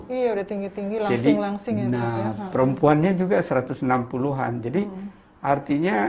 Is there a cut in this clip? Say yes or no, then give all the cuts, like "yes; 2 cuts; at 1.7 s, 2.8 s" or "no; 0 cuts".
no; 0 cuts